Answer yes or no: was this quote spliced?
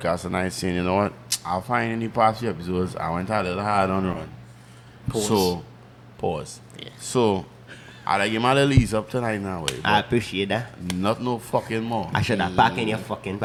no